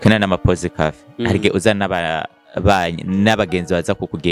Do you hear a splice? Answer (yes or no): no